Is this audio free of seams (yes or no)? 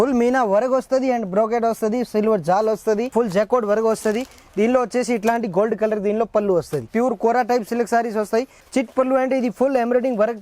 no